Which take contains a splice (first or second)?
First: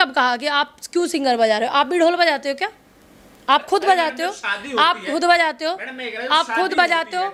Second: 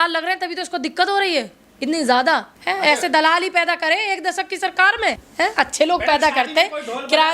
second